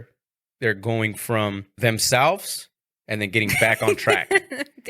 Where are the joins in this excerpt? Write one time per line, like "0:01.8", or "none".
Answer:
0:01.7